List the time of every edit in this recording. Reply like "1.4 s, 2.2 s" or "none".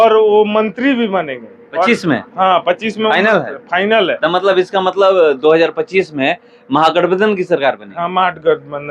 none